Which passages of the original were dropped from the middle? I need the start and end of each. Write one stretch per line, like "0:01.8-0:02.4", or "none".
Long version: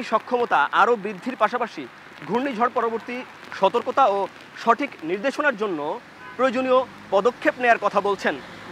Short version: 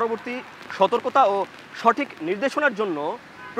none